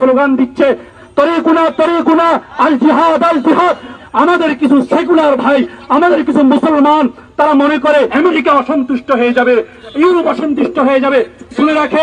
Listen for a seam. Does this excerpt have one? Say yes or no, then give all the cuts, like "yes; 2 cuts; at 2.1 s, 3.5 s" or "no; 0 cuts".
yes; 3 cuts; at 0.9 s, 4.0 s, 8.1 s